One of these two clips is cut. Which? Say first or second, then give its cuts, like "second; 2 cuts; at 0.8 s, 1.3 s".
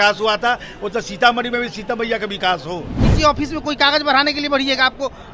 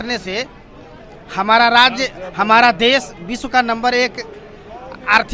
first; 1 cut; at 3.0 s